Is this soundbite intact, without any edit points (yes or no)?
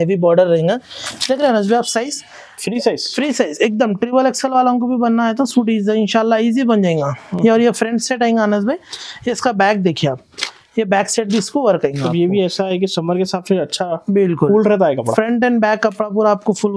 yes